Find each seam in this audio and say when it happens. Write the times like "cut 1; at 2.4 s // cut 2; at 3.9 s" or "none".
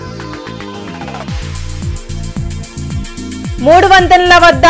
cut 1; at 1.3 s // cut 2; at 2.8 s

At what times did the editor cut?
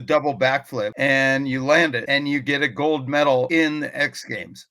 cut 1; at 0.9 s // cut 2; at 2.0 s // cut 3; at 3.5 s

